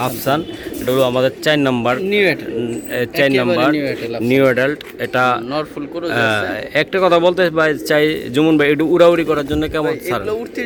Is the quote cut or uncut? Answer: uncut